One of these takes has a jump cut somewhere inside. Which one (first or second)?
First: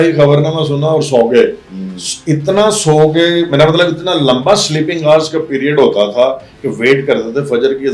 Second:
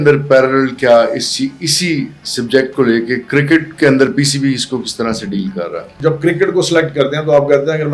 second